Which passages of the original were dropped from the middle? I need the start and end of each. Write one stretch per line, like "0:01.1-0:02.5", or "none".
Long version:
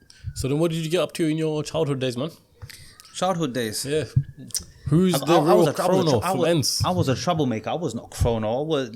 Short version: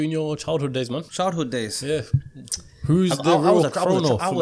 0:02.3-0:03.1